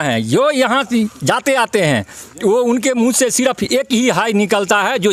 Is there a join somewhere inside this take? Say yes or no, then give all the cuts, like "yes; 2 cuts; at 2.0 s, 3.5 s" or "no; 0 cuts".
no; 0 cuts